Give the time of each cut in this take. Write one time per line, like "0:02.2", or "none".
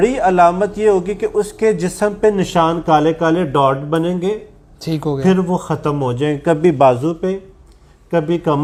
none